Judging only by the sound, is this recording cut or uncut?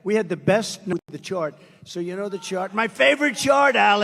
cut